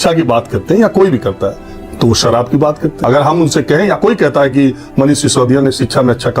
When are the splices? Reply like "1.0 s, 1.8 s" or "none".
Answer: 3.0 s